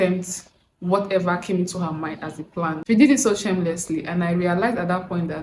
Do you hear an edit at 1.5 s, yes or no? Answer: no